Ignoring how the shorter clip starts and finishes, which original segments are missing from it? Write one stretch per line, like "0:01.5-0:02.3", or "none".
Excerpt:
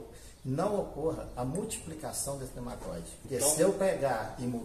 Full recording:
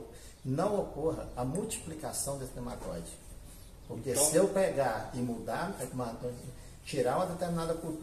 0:03.2-0:04.0